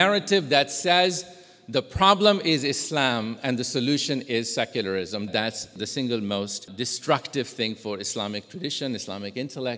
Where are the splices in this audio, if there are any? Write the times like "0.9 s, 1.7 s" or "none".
5.3 s, 6.7 s